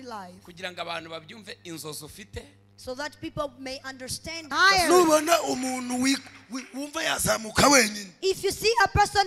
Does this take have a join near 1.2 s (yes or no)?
no